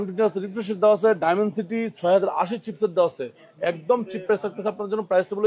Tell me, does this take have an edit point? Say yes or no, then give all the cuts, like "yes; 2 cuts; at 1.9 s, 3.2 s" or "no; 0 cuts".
no; 0 cuts